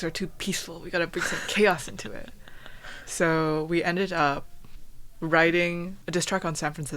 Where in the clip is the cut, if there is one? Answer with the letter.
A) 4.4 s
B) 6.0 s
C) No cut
B